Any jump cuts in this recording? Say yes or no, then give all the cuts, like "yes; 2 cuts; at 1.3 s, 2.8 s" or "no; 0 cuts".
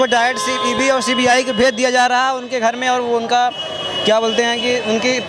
no; 0 cuts